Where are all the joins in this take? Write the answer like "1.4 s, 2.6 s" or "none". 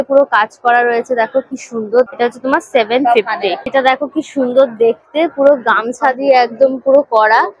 none